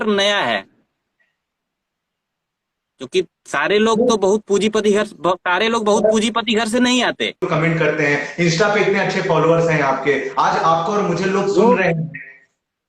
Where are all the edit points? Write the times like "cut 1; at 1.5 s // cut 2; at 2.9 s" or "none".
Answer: cut 1; at 7.5 s